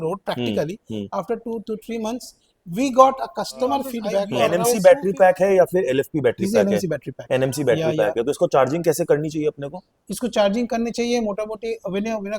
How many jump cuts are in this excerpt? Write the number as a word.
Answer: one